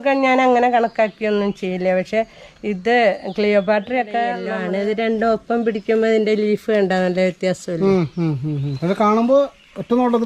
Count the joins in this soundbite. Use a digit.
1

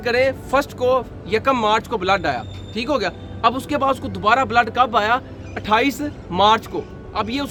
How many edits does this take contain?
0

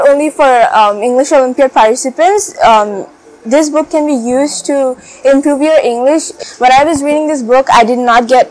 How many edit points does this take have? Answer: 1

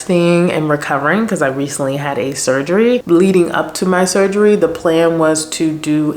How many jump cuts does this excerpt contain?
1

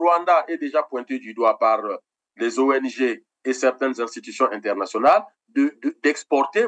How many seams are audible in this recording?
0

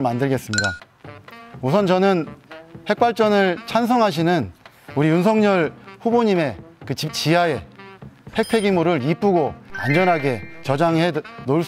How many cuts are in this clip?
0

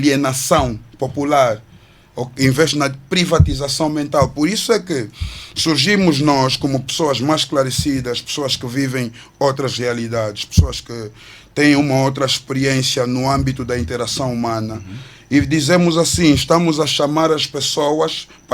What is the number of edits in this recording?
0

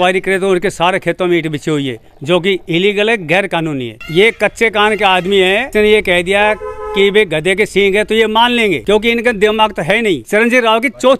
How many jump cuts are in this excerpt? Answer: 4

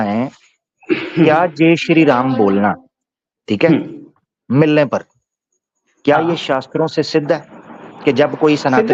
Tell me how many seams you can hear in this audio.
0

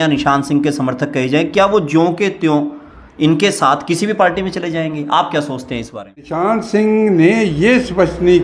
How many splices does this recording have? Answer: 1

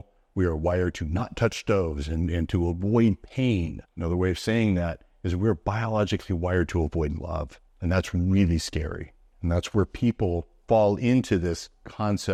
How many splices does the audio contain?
0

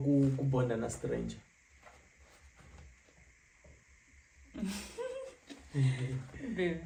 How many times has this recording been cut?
0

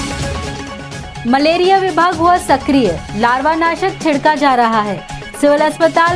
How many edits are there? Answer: 1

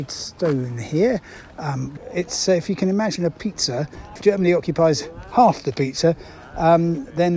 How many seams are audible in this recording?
2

